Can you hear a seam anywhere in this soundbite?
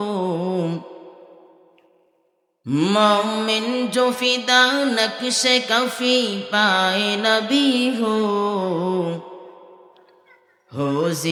no; 0 cuts

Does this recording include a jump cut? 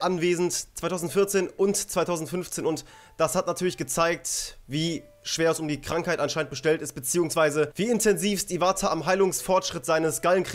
no; 0 cuts

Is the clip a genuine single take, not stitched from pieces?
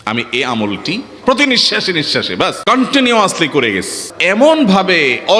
no; 3 cuts; at 1.1 s, 2.6 s, 4.1 s

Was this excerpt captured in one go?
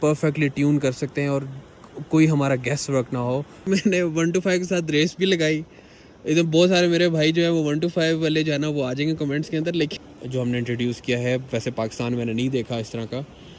no; 2 cuts; at 3.7 s, 9.9 s

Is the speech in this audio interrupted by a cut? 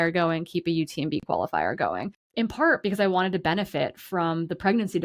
yes; 1 cut; at 2.2 s

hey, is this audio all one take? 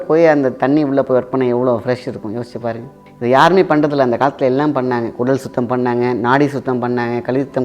yes; 0 cuts

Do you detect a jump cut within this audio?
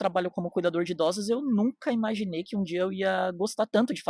no; 0 cuts

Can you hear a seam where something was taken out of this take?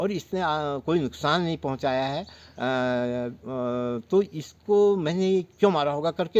no; 0 cuts

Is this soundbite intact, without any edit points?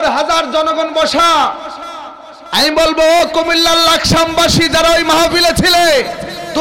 yes; 0 cuts

